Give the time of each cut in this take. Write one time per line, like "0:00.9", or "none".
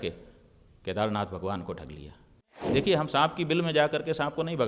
0:02.6